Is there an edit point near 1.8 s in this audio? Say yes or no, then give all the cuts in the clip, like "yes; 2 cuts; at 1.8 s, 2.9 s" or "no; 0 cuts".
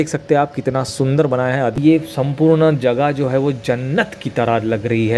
yes; 1 cut; at 1.8 s